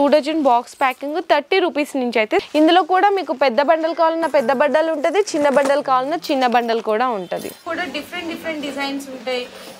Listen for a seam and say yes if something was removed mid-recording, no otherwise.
yes